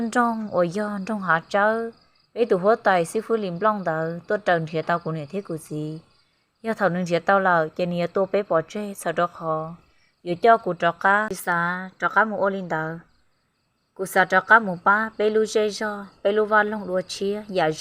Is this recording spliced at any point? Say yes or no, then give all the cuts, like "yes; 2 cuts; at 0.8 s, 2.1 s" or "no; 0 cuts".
yes; 1 cut; at 11.4 s